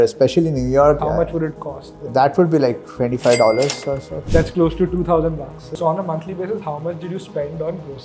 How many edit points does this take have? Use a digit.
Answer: 3